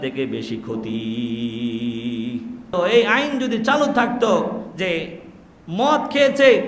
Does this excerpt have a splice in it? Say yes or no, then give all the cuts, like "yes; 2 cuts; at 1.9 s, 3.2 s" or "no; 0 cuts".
yes; 1 cut; at 2.7 s